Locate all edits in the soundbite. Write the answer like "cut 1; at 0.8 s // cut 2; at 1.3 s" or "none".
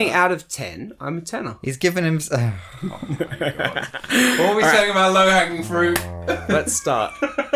none